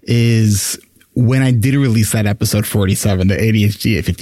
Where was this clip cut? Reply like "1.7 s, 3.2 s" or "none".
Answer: none